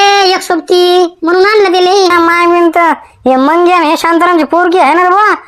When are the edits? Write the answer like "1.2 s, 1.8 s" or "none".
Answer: 2.1 s